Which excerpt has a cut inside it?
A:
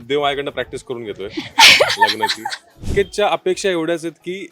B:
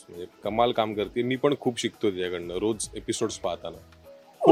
A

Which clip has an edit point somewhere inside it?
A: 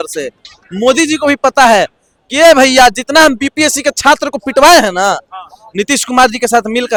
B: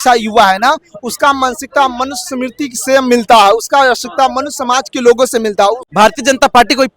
B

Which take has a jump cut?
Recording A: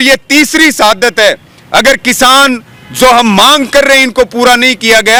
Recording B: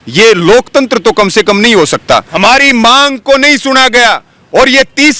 B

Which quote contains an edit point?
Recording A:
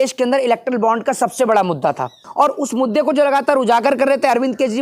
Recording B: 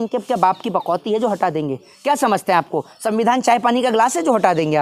A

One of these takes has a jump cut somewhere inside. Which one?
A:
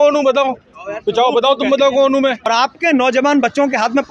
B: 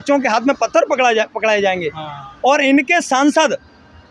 A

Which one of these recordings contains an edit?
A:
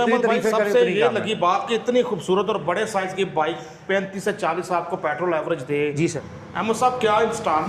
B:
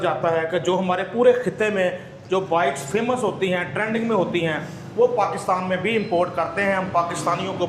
A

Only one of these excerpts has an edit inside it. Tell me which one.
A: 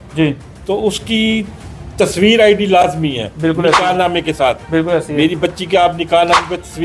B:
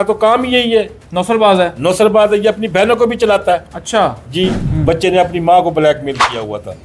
B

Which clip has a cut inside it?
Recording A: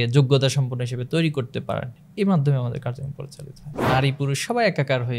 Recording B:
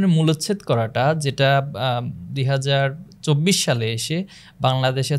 A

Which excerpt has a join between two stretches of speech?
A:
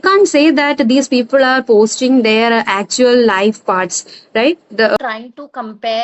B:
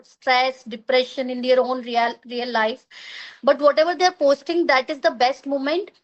A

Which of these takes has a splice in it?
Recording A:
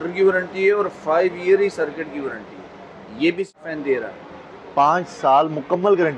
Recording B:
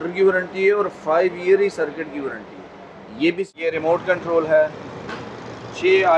B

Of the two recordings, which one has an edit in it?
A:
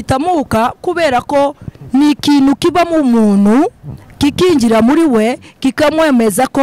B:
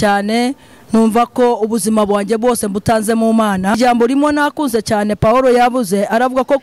B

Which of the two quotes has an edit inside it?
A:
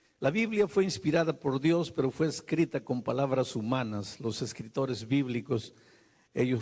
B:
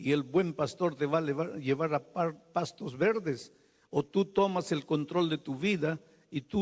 B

